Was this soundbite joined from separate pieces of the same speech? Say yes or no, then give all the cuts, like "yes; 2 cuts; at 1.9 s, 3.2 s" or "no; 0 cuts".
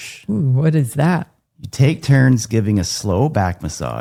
no; 0 cuts